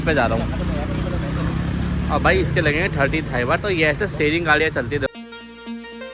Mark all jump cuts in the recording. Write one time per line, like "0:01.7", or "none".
0:05.1